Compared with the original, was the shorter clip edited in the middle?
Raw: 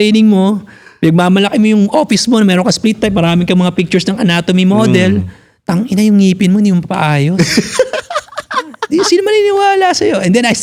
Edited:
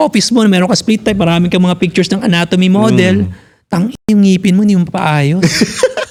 no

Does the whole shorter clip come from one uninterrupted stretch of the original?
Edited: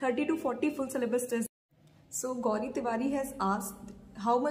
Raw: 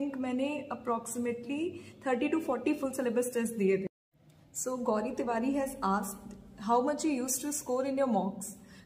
no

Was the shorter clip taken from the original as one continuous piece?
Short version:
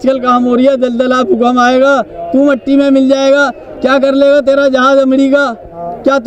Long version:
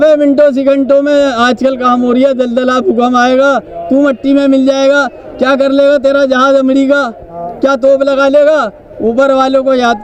yes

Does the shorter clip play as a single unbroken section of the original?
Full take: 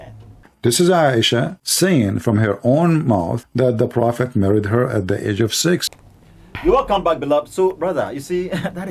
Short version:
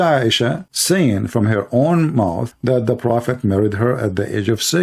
yes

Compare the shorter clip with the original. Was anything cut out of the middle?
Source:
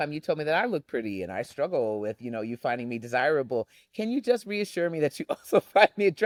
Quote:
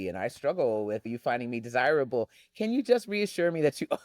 yes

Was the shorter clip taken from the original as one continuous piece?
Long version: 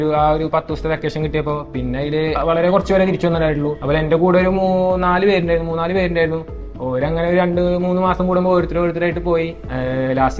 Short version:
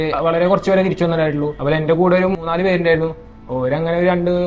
no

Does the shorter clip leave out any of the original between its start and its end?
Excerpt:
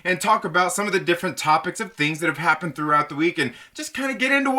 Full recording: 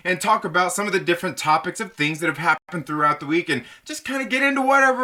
yes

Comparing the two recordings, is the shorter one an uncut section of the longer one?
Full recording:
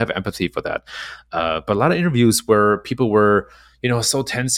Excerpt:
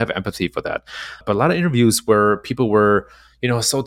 no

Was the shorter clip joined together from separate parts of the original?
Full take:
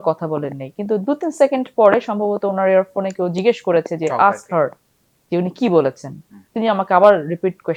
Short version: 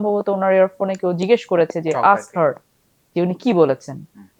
no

